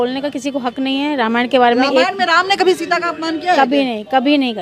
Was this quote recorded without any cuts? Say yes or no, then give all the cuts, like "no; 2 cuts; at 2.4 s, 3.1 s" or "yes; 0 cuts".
yes; 0 cuts